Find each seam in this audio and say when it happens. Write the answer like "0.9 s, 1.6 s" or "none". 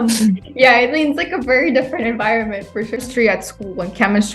3.0 s